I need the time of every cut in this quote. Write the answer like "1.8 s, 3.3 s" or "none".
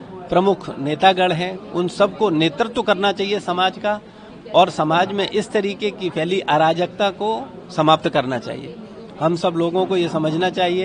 none